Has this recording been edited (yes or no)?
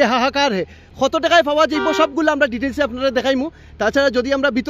no